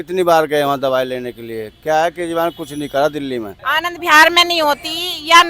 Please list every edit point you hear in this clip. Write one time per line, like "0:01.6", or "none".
0:03.5